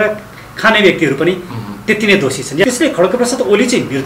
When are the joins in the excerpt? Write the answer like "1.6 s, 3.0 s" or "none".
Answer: 2.6 s